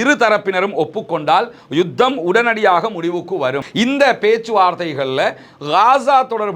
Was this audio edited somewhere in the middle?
yes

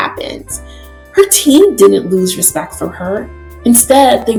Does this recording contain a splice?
no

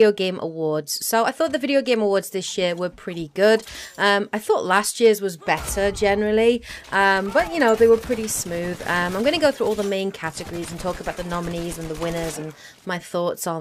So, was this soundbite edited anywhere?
yes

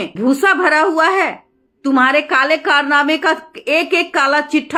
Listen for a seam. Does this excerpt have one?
no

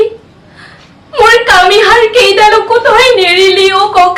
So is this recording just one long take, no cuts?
yes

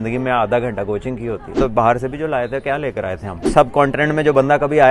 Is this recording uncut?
no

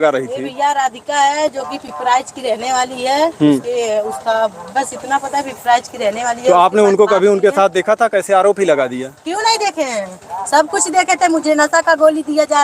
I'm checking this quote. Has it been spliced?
no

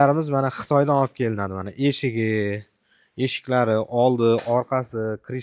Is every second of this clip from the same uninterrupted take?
yes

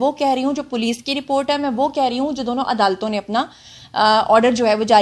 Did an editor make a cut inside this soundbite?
no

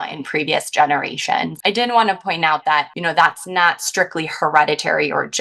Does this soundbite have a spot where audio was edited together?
yes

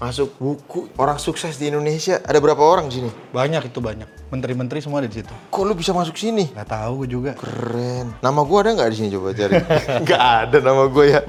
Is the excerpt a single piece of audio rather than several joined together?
yes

